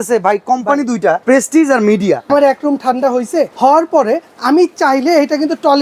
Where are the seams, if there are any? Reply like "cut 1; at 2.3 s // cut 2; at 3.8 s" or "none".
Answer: cut 1; at 1.2 s // cut 2; at 2.3 s // cut 3; at 3.5 s